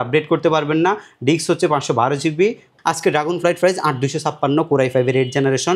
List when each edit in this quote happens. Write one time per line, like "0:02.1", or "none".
0:02.7